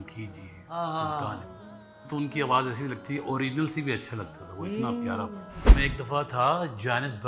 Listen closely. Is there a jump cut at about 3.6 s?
no; 2 cuts; at 1.9 s, 5.7 s

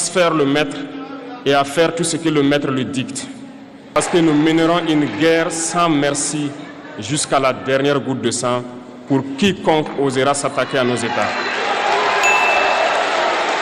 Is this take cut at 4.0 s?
yes; 1 cut; at 4.0 s

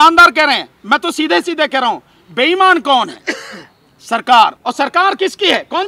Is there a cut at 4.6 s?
yes; 1 cut; at 4.6 s

